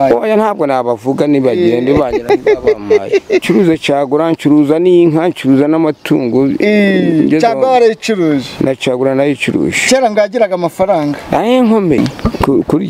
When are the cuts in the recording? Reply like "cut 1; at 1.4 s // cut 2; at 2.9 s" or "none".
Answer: cut 1; at 3.4 s // cut 2; at 12.0 s